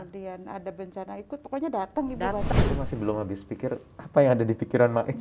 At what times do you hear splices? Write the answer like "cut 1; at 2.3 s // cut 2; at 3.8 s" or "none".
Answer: cut 1; at 2.5 s